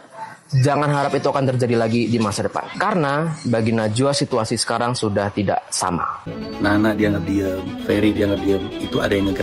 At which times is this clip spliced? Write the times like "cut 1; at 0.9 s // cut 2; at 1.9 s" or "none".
cut 1; at 6.2 s